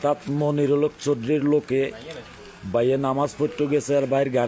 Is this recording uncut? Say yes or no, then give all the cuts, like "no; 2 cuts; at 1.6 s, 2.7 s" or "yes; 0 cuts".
yes; 0 cuts